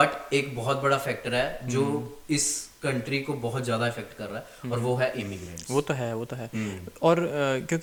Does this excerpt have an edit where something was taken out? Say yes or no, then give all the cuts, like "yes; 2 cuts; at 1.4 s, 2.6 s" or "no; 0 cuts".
no; 0 cuts